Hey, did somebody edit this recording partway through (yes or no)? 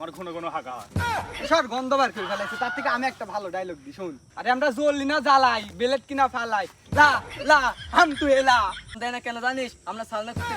yes